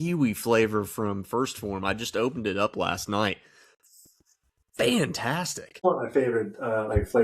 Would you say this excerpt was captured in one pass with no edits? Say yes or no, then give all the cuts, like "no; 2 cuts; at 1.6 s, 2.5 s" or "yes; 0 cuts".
no; 1 cut; at 5.6 s